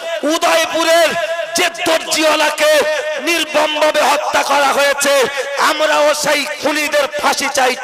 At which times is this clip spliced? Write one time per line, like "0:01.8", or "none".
none